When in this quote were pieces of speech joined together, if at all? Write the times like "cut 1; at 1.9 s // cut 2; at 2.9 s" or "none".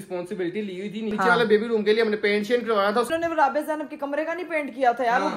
cut 1; at 1.1 s // cut 2; at 3.1 s